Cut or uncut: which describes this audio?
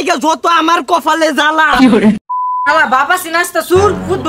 cut